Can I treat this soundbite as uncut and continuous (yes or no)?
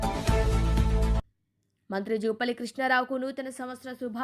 no